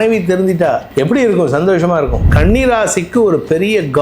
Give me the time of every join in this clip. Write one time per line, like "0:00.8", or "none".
0:00.9
0:02.3